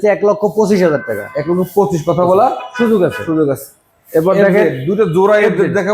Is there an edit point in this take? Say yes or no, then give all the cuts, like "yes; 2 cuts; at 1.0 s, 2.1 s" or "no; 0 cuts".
no; 0 cuts